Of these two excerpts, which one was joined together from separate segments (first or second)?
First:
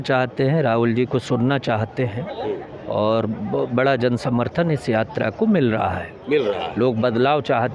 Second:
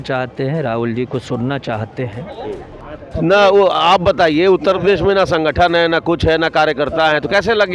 second